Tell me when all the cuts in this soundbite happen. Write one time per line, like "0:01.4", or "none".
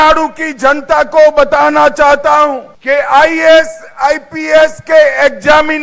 0:02.7